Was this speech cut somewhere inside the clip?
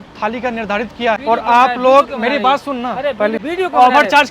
yes; 2 cuts; at 1.2 s, 3.4 s

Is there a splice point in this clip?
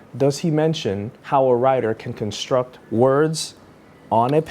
yes; 1 cut; at 1.1 s

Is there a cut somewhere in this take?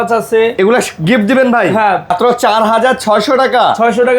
yes; 1 cut; at 2.1 s

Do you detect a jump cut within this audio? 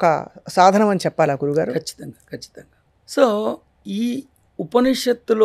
no; 0 cuts

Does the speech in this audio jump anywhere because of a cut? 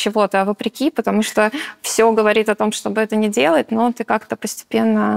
no; 0 cuts

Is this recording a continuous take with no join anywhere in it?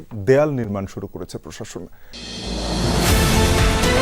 no; 1 cut; at 2.3 s

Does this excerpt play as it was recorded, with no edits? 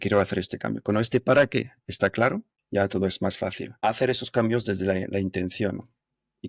no; 2 cuts; at 2.5 s, 3.7 s

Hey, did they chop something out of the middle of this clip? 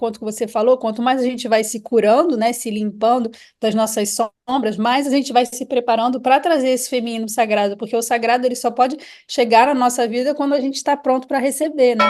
no; 0 cuts

